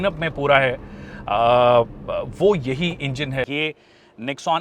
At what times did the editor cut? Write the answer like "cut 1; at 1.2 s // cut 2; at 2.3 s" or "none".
cut 1; at 3.5 s